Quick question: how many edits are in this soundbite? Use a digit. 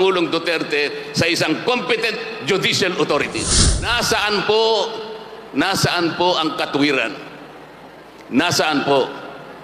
1